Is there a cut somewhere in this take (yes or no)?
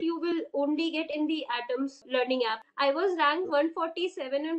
yes